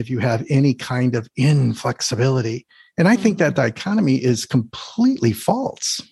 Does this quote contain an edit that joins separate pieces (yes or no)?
no